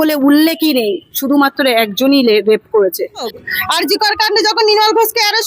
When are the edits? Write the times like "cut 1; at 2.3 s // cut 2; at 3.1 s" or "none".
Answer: cut 1; at 3.4 s